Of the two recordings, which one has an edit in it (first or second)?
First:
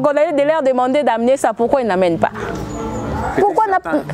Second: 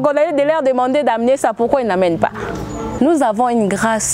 second